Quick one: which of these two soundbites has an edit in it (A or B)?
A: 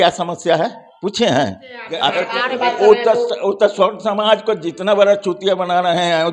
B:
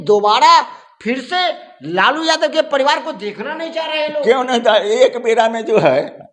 A